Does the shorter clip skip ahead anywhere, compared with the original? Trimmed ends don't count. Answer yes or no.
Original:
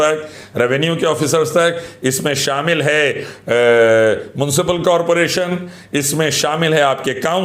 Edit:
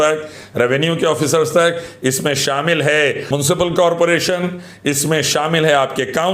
yes